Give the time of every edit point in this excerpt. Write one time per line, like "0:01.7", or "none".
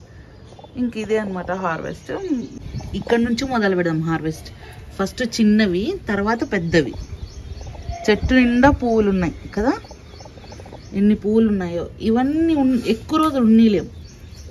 0:02.6